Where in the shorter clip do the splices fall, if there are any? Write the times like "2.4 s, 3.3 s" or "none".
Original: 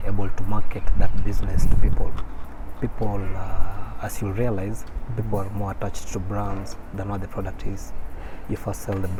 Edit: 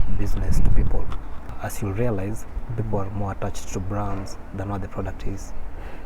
1.4 s